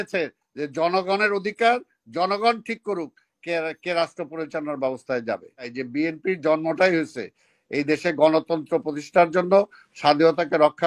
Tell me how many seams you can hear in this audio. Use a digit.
1